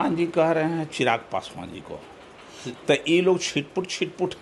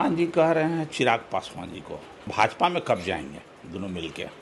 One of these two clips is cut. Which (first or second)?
second